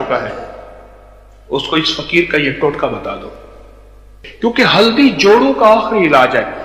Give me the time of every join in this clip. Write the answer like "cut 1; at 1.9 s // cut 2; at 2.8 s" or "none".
cut 1; at 4.2 s